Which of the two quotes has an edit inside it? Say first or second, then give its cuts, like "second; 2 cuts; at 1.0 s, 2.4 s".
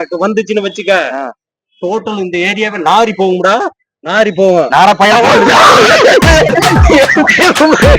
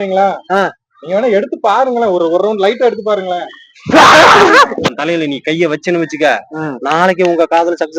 second; 1 cut; at 4.9 s